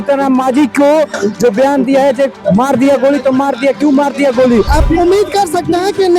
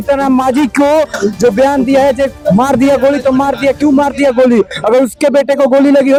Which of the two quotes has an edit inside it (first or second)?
first